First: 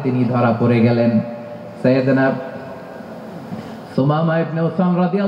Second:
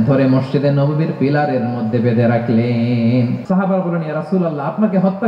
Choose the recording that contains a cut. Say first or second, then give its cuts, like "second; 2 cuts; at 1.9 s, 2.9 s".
second; 1 cut; at 3.4 s